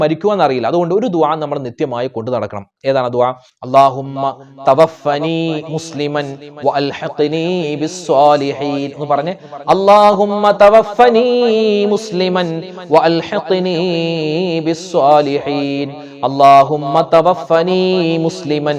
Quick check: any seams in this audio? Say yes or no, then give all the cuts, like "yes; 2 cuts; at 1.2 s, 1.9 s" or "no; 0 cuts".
no; 0 cuts